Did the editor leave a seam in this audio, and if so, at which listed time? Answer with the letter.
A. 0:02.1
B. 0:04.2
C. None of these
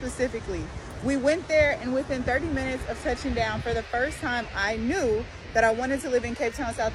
C